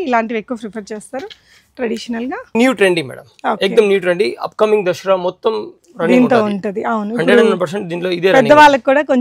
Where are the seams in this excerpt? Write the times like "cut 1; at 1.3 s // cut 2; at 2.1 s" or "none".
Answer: cut 1; at 2.5 s

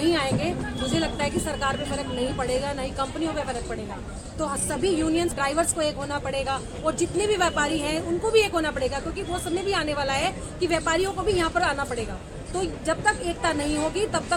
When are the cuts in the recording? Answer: none

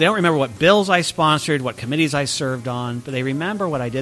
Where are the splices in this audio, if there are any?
none

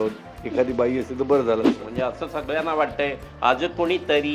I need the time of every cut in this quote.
cut 1; at 1.8 s

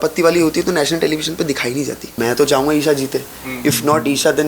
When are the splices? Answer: cut 1; at 2.1 s

